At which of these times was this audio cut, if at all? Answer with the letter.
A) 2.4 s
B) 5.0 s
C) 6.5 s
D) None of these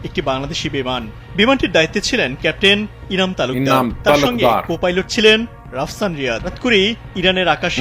C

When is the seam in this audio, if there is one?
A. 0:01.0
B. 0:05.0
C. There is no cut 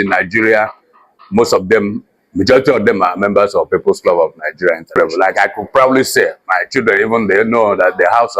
B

